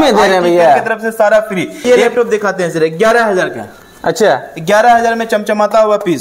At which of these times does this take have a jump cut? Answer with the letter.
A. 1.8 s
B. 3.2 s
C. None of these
A